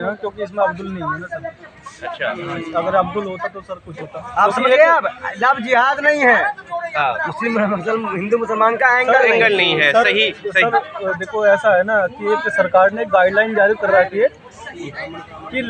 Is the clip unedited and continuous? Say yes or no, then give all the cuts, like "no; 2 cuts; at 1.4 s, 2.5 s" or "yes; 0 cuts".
yes; 0 cuts